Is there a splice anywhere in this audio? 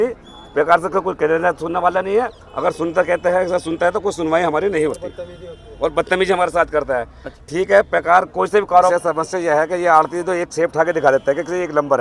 yes; 1 cut; at 8.9 s

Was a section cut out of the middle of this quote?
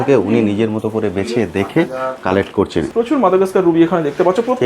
yes; 1 cut; at 2.9 s

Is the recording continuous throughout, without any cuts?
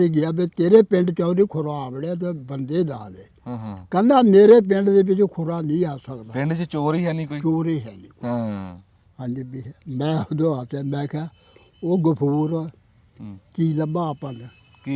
yes; 0 cuts

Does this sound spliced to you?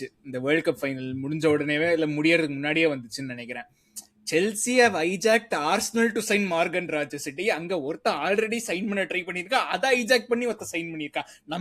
no; 0 cuts

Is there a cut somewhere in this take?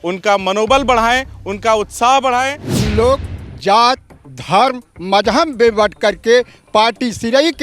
yes; 1 cut; at 2.8 s

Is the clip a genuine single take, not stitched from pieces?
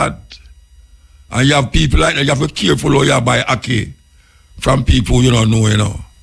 yes; 0 cuts

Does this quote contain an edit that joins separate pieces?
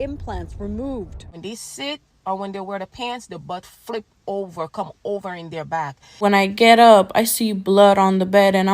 yes; 2 cuts; at 1.3 s, 6.2 s

